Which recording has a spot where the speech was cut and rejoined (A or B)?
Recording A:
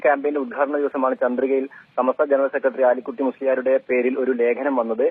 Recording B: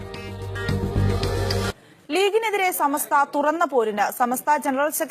B